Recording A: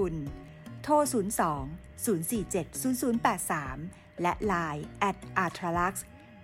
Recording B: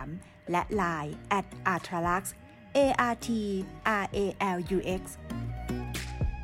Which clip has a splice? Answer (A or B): B